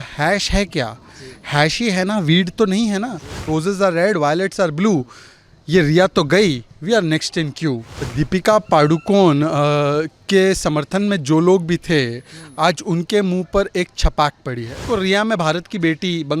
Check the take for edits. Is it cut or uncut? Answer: cut